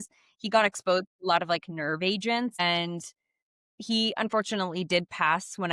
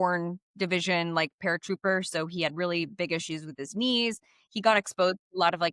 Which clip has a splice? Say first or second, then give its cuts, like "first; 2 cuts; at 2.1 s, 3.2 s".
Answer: first; 1 cut; at 2.5 s